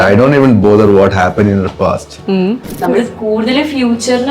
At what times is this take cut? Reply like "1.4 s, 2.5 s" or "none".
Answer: 2.7 s

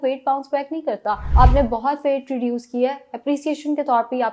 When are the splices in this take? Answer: 1.2 s

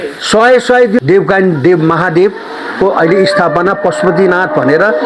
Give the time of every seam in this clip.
1.0 s

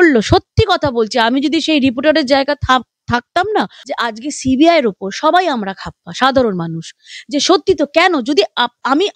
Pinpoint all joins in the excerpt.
3.8 s

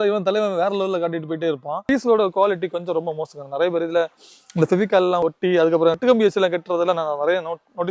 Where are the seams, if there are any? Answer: 1.9 s

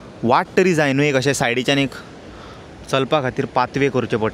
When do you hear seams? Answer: none

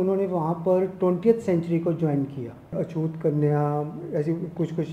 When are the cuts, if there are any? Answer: 2.7 s

